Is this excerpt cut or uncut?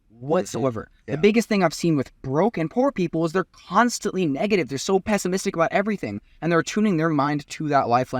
uncut